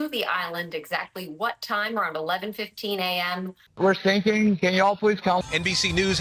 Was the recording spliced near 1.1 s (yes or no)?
no